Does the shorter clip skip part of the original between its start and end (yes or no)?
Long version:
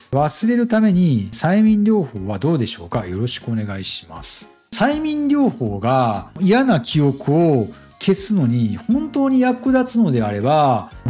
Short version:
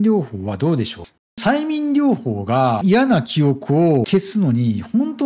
yes